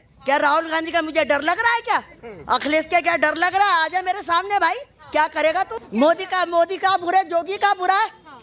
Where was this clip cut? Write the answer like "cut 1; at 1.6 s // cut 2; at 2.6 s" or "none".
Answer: cut 1; at 5.8 s